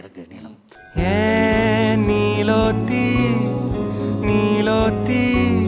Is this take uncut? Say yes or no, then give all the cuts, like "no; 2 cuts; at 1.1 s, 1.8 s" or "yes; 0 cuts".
yes; 0 cuts